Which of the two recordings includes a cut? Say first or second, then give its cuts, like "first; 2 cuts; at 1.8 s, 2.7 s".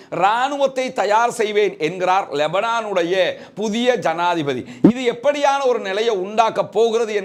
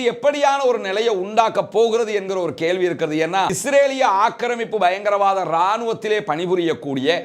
second; 1 cut; at 3.6 s